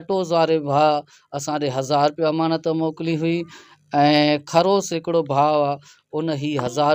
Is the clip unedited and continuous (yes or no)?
yes